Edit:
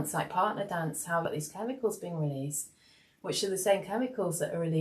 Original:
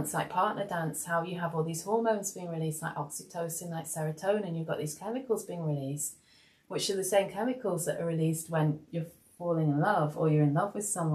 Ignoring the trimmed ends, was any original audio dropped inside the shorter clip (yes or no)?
yes